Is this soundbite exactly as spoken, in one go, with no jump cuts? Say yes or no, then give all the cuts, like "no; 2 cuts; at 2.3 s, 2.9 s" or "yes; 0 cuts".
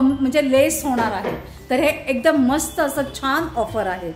yes; 0 cuts